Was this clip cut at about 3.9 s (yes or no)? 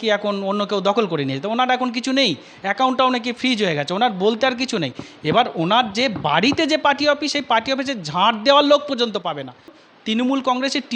no